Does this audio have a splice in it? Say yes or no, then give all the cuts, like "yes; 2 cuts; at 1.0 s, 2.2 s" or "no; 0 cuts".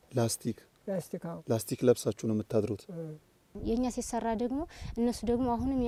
no; 0 cuts